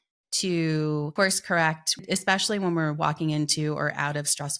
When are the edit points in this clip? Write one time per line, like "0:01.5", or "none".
0:01.1
0:02.0